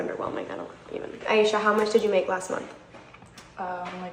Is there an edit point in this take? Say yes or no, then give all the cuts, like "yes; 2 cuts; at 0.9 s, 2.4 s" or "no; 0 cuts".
no; 0 cuts